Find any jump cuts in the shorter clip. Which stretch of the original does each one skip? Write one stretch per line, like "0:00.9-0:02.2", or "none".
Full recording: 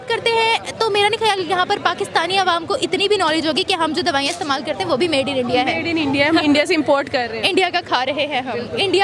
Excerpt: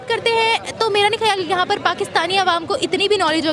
none